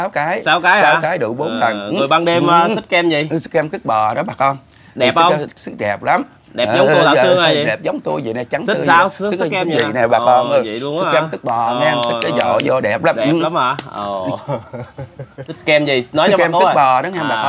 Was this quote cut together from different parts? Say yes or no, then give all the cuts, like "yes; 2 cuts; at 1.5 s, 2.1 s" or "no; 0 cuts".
yes; 1 cut; at 15.5 s